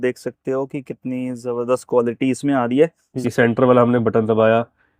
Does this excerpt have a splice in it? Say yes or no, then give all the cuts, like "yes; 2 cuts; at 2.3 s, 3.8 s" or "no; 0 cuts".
yes; 1 cut; at 3.1 s